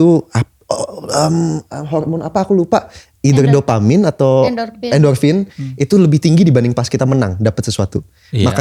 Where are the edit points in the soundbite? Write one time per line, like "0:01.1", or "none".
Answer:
none